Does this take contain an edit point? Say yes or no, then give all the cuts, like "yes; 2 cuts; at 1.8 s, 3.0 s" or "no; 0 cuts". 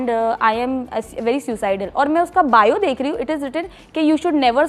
no; 0 cuts